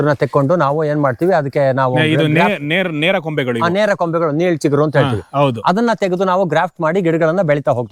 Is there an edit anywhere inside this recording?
no; 0 cuts

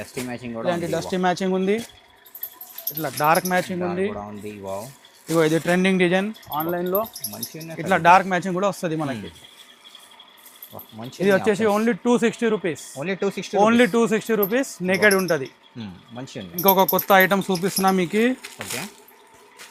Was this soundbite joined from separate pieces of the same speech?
no; 0 cuts

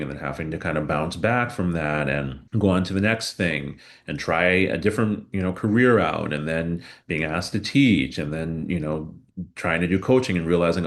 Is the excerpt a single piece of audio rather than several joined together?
no; 1 cut; at 2.4 s

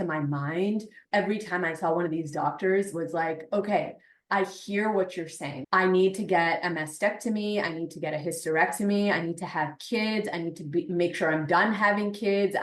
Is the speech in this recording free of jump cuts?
no; 2 cuts; at 1.0 s, 5.5 s

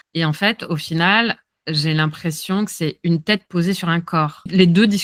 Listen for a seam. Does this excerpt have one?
no; 0 cuts

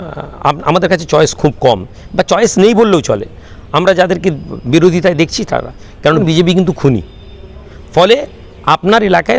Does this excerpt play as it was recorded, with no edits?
no; 1 cut; at 6.2 s

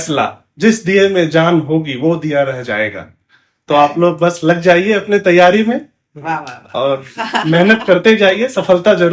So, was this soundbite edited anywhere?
no; 0 cuts

